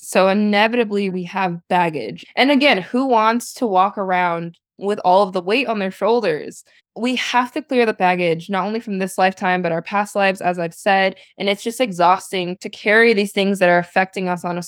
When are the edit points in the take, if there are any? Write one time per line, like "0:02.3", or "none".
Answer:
0:01.1